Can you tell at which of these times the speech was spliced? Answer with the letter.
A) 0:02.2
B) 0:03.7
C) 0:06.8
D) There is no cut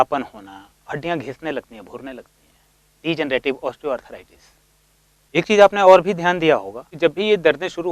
C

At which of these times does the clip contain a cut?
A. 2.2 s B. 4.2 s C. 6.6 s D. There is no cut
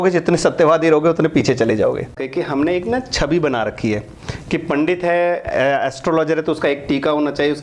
A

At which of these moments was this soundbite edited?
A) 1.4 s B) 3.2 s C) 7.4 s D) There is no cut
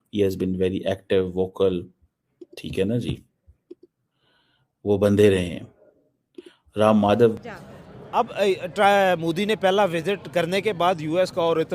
C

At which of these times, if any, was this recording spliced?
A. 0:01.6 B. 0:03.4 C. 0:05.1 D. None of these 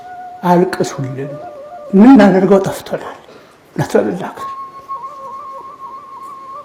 D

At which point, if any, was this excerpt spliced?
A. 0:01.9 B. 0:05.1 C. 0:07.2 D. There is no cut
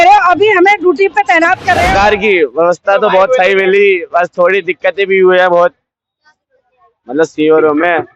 A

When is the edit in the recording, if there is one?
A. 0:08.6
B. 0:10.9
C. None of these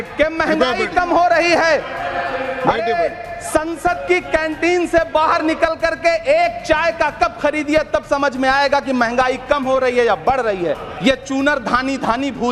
B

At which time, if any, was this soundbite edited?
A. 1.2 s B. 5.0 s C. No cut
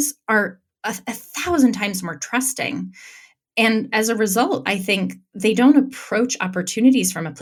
C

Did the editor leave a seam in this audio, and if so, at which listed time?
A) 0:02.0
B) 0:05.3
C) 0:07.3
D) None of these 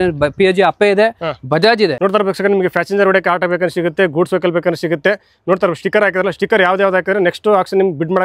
A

